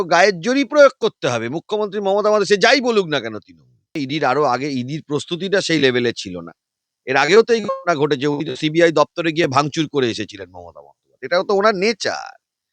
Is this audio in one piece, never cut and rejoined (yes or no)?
no